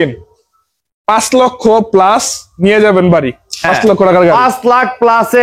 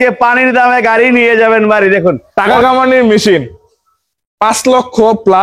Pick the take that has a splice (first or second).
second